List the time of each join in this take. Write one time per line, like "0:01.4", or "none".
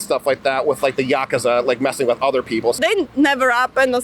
0:02.8